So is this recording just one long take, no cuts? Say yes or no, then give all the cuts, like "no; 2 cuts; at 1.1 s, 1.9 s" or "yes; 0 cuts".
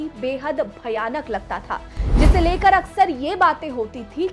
yes; 0 cuts